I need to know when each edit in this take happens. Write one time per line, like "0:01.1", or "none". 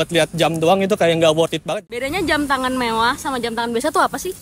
0:01.7